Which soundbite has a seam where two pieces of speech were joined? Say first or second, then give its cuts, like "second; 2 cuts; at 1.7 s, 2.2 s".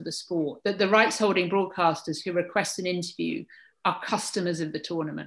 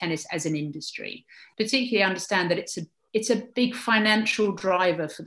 second; 1 cut; at 1.4 s